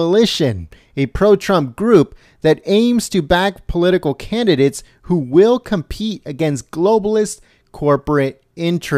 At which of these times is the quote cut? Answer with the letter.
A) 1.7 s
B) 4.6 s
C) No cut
C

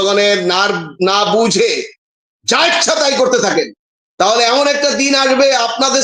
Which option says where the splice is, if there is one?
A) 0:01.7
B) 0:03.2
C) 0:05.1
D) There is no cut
D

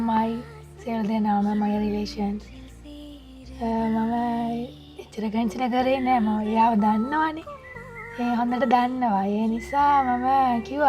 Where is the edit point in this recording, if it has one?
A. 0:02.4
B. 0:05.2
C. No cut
C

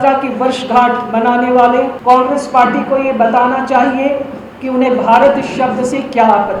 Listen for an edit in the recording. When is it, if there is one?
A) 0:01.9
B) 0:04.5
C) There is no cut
A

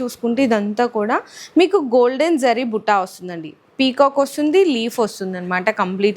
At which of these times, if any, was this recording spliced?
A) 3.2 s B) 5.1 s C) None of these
C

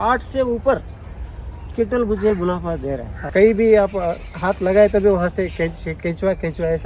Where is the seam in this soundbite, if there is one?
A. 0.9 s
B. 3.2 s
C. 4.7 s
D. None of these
B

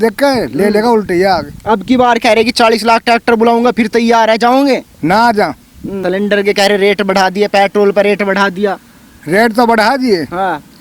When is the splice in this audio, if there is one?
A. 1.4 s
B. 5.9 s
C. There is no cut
B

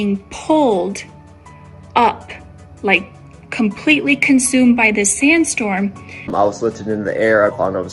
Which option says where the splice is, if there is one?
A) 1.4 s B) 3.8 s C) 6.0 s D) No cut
C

